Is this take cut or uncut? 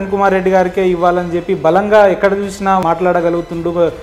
cut